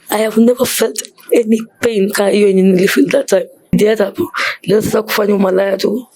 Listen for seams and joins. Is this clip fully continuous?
no; 1 cut; at 3.7 s

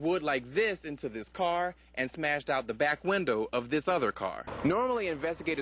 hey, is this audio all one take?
no; 1 cut; at 4.5 s

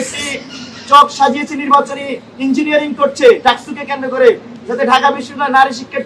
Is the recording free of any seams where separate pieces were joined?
yes; 0 cuts

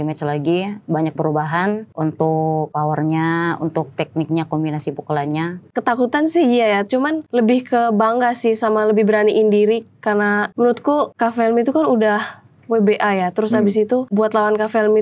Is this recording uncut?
no; 6 cuts; at 1.9 s, 2.7 s, 5.6 s, 7.2 s, 10.8 s, 14.1 s

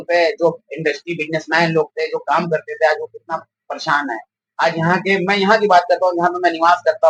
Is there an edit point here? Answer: no; 0 cuts

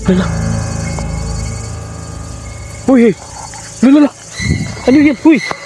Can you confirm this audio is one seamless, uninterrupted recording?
yes; 0 cuts

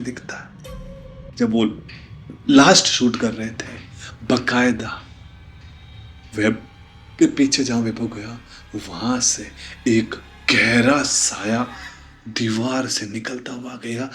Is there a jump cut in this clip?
yes; 1 cut; at 1.2 s

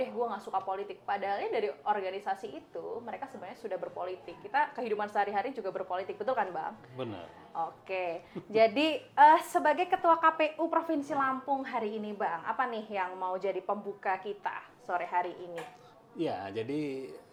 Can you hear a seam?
no; 0 cuts

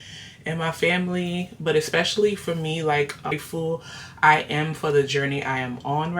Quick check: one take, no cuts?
no; 1 cut; at 3.3 s

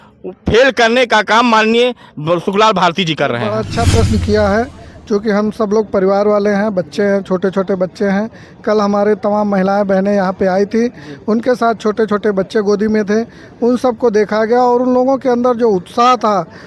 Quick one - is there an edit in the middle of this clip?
yes; 1 cut; at 3.6 s

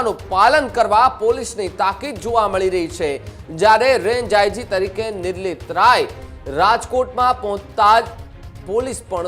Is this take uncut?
yes; 0 cuts

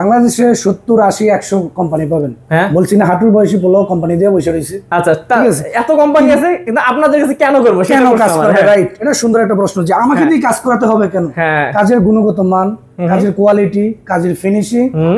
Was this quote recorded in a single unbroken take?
yes; 0 cuts

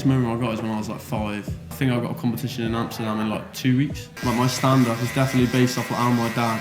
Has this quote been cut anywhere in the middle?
yes; 2 cuts; at 1.7 s, 4.1 s

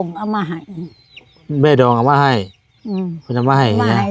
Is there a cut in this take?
no; 0 cuts

